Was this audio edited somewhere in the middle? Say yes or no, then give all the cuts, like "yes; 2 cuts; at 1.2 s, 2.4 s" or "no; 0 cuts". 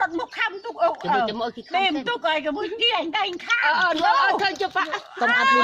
no; 0 cuts